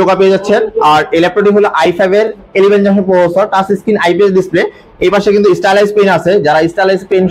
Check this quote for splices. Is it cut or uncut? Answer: uncut